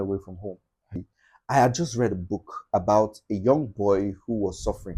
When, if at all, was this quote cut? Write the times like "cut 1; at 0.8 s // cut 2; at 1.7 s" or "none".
cut 1; at 1.1 s